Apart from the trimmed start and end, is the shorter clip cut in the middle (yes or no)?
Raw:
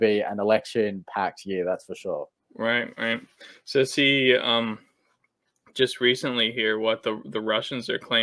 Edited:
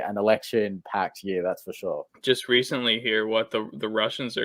yes